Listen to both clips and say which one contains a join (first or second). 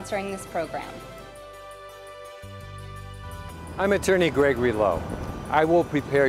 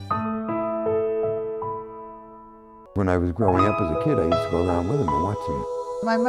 first